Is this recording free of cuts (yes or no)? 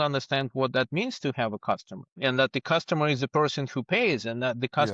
yes